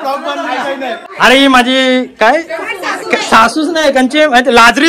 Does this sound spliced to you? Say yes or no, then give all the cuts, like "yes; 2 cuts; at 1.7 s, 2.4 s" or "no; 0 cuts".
yes; 1 cut; at 1.1 s